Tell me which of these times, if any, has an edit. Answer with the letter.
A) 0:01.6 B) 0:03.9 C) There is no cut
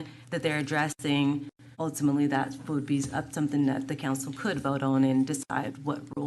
A